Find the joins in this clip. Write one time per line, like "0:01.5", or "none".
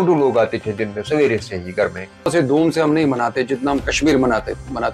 0:02.3